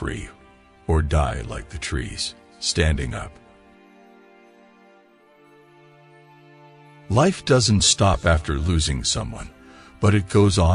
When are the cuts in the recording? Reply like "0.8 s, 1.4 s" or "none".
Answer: 3.3 s, 5.5 s, 7.1 s